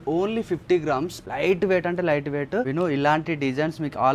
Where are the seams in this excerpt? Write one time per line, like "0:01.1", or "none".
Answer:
0:01.2
0:02.7